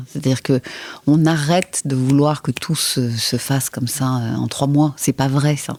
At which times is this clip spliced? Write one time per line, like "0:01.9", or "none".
none